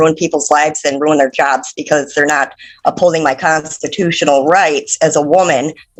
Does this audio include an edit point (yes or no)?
no